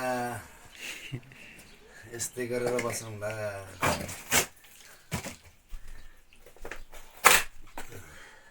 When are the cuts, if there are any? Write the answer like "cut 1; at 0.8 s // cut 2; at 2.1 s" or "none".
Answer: cut 1; at 3.7 s